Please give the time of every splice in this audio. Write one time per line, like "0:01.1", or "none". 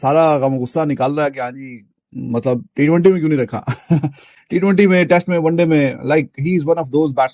none